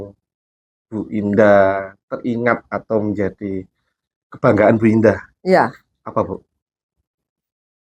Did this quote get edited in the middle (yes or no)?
no